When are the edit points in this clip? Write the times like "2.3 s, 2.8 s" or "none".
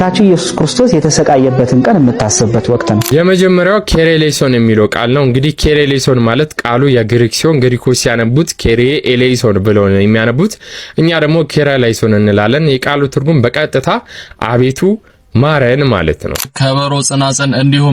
3.0 s, 16.4 s